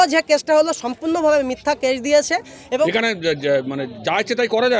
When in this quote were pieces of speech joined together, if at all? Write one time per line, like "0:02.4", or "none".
0:02.8